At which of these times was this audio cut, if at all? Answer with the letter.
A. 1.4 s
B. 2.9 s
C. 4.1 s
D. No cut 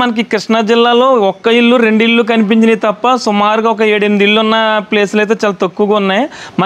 D